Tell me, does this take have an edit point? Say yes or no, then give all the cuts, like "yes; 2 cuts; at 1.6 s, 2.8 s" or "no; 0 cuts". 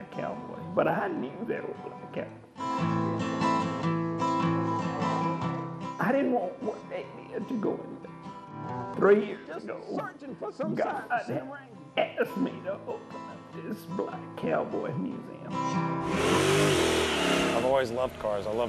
yes; 2 cuts; at 8.8 s, 16.2 s